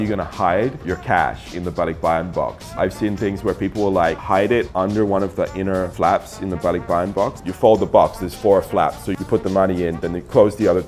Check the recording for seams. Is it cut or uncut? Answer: uncut